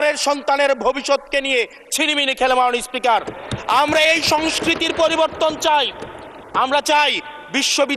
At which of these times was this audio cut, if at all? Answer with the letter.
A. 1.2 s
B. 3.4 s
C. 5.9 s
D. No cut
D